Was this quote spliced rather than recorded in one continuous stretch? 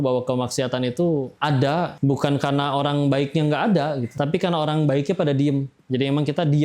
no; 0 cuts

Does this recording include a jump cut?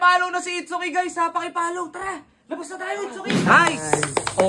no; 0 cuts

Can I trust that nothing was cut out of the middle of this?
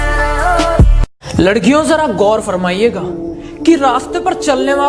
yes; 0 cuts

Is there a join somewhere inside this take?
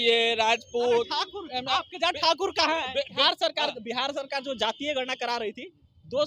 yes; 1 cut; at 3.2 s

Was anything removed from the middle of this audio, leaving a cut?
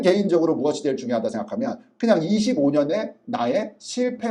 no; 0 cuts

